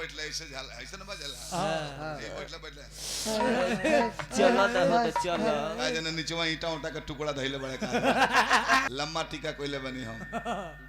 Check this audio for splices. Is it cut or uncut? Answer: cut